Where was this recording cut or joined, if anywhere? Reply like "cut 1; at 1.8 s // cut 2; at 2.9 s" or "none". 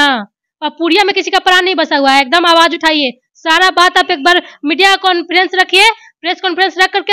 none

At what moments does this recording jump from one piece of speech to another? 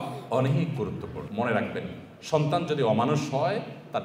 cut 1; at 1.3 s

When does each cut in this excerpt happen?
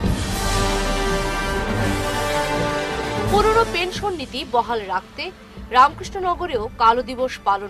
cut 1; at 3.0 s

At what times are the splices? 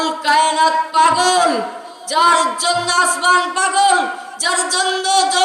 none

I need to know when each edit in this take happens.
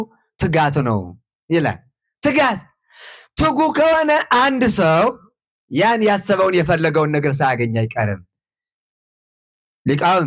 none

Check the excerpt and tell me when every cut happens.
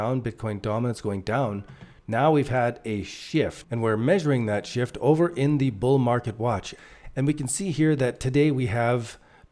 cut 1; at 3.6 s // cut 2; at 6.7 s

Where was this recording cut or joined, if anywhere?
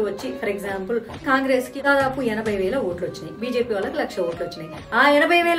none

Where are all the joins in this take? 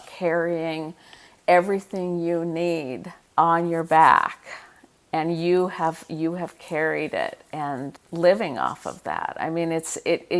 cut 1; at 2.8 s // cut 2; at 8.0 s

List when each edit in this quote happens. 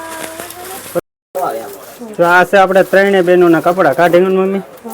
cut 1; at 1.0 s

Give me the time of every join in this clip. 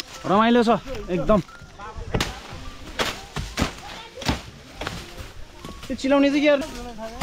none

